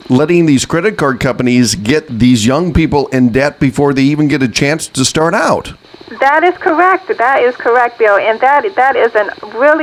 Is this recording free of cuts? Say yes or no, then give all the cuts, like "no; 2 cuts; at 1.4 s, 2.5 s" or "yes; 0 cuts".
yes; 0 cuts